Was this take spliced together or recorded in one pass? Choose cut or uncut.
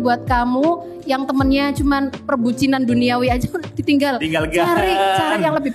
uncut